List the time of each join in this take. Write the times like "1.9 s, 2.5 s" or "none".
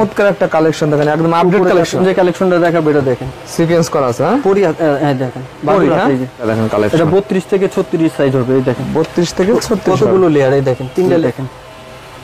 2.0 s, 6.4 s, 11.2 s